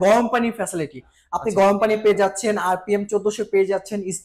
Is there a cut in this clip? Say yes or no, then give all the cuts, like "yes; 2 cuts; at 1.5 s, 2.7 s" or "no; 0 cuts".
no; 0 cuts